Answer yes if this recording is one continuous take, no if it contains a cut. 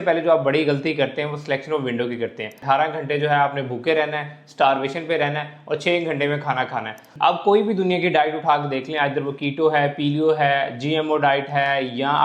no